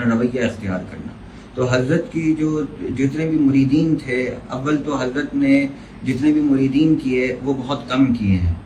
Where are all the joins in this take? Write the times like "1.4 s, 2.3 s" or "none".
none